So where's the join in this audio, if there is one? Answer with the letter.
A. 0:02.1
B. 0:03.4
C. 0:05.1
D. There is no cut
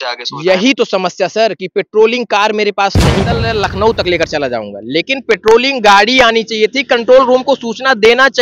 B